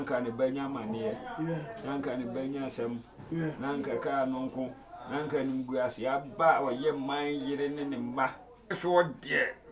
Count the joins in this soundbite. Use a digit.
1